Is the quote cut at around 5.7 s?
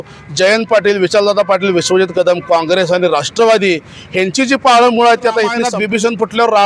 yes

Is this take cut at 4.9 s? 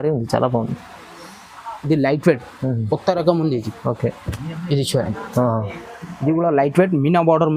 no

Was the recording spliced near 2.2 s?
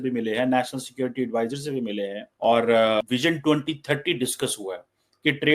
yes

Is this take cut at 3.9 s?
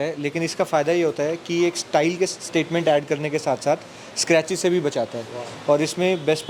no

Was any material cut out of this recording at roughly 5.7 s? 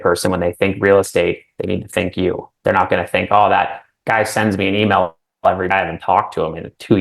yes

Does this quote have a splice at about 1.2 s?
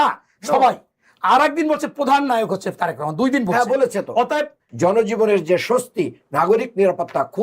no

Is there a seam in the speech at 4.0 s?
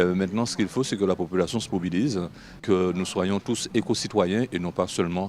no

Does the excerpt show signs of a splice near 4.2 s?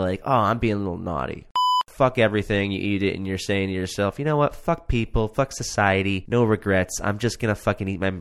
no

